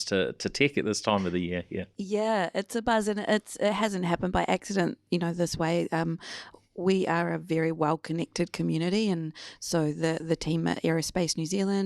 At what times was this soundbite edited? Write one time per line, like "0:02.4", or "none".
none